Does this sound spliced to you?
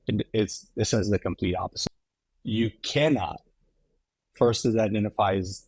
yes; 1 cut; at 1.7 s

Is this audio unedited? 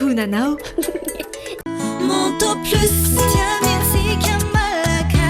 yes; 0 cuts

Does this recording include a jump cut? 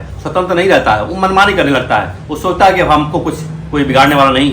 no; 0 cuts

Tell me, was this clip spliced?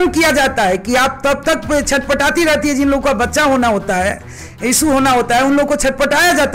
no; 0 cuts

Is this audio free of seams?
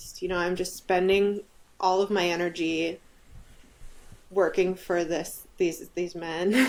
yes; 0 cuts

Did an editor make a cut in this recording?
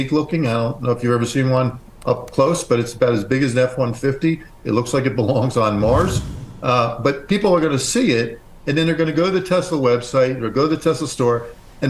no; 0 cuts

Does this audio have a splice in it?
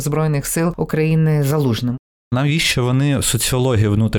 yes; 2 cuts; at 0.7 s, 2.3 s

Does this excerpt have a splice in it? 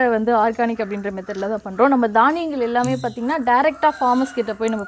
no; 0 cuts

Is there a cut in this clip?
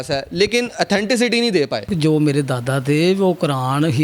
yes; 1 cut; at 1.9 s

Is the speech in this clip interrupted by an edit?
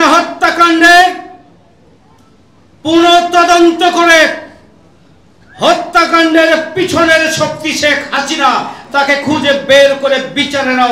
no; 0 cuts

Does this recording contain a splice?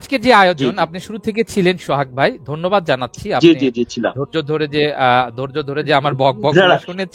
no; 0 cuts

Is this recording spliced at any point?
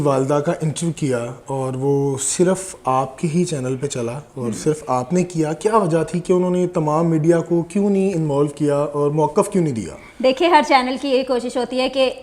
no; 0 cuts

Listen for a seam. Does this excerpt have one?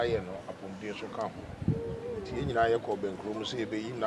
no; 0 cuts

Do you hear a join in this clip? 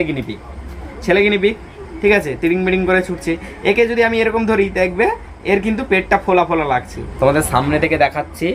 yes; 1 cut; at 7.0 s

